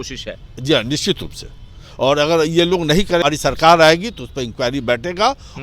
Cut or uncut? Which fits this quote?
cut